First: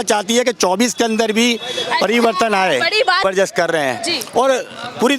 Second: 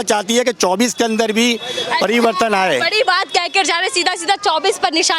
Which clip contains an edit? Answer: first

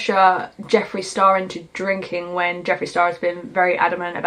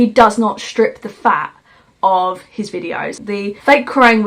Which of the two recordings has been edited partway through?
second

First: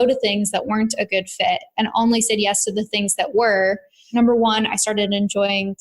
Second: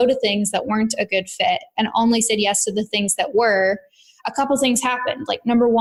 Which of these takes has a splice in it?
first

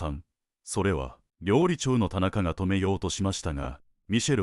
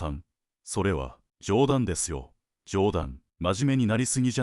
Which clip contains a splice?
second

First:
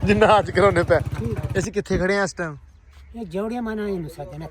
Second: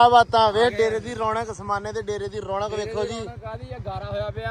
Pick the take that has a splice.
first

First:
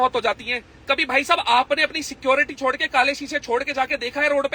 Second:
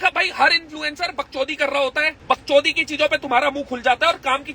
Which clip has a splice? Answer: second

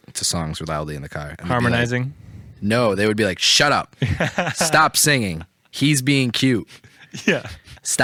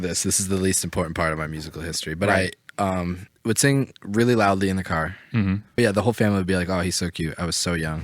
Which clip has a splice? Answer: second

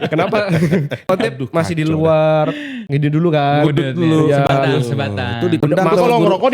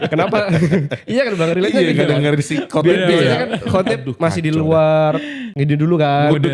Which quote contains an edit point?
first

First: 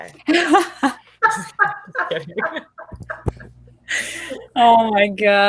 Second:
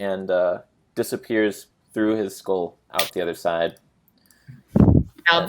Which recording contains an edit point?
second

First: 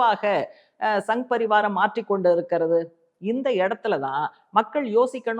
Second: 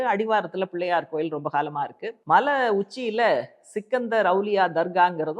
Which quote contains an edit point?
second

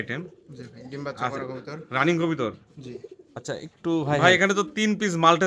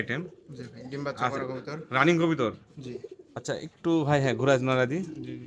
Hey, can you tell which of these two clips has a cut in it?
first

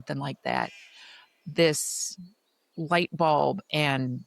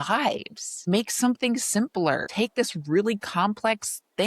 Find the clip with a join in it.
second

